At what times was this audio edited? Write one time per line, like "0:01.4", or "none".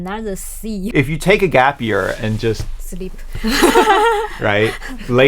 0:00.9